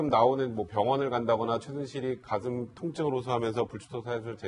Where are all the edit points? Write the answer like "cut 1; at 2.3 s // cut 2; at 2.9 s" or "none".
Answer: cut 1; at 1.7 s